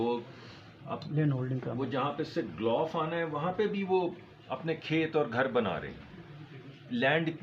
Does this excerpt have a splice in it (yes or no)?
no